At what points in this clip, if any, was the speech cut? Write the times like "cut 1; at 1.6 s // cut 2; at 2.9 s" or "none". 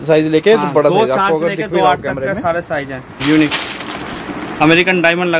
cut 1; at 3.1 s

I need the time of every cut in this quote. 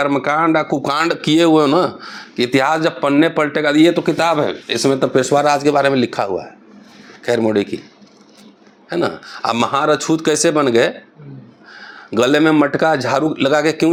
none

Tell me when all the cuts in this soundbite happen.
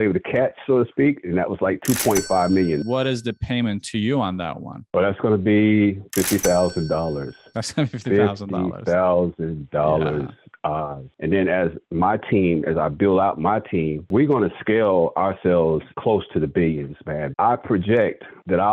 cut 1; at 2.8 s // cut 2; at 11.1 s // cut 3; at 17.3 s

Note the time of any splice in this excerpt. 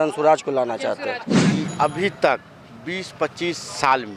cut 1; at 1.5 s

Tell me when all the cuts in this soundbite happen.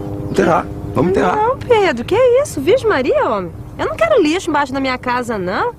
cut 1; at 2.0 s

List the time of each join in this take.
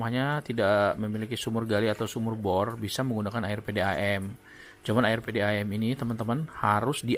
none

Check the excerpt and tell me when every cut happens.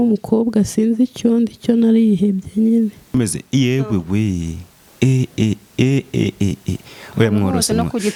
none

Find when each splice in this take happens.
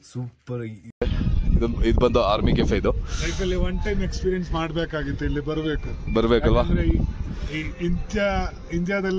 cut 1; at 1.0 s

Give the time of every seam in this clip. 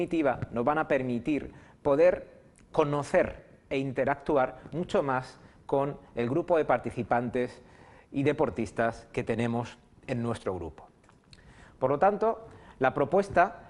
cut 1; at 5.0 s

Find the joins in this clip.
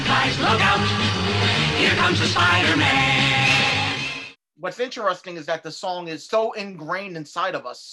cut 1; at 4.0 s // cut 2; at 6.2 s

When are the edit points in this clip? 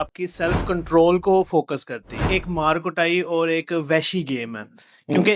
cut 1; at 2.3 s

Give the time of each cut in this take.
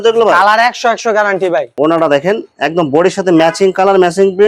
cut 1; at 1.8 s

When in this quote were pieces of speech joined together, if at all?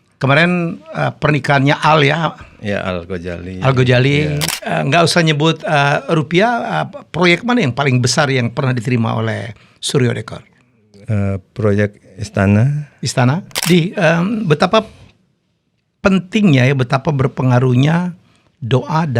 cut 1; at 4.5 s // cut 2; at 13.5 s

